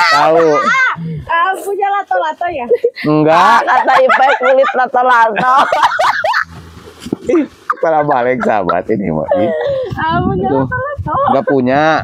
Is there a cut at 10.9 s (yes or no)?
no